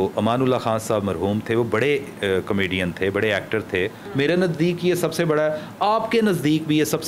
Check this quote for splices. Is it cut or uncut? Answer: cut